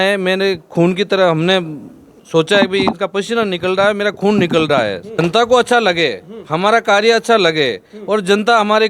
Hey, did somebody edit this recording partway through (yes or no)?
yes